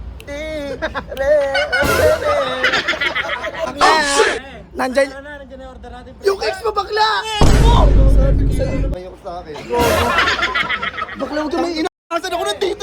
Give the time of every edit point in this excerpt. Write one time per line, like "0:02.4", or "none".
0:03.7
0:08.9